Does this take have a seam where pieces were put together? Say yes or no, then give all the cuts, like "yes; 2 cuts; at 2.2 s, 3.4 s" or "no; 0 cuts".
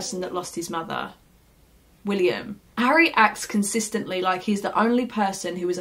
no; 0 cuts